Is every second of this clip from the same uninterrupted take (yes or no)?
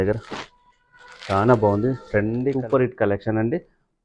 no